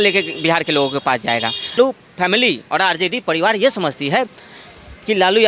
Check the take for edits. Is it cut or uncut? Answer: cut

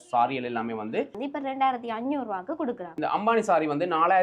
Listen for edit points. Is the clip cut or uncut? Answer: cut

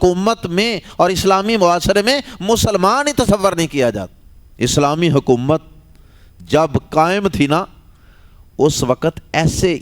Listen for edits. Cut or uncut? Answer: uncut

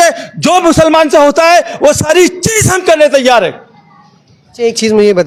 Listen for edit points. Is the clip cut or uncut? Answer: uncut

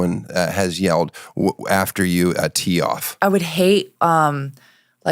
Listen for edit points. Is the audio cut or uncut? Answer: cut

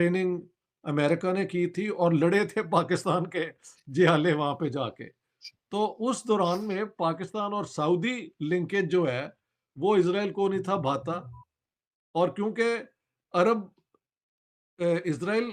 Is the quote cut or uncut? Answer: uncut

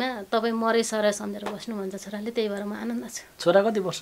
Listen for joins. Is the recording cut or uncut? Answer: uncut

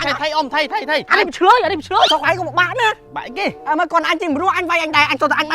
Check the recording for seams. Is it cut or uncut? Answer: cut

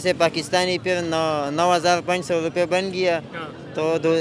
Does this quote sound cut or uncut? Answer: uncut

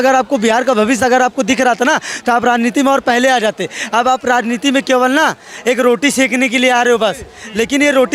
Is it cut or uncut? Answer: uncut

